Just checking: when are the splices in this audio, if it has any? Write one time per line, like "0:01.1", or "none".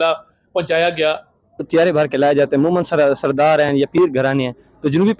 0:01.7